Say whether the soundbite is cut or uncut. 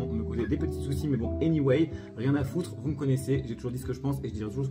uncut